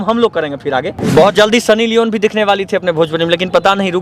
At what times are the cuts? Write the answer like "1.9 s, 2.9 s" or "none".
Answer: 1.0 s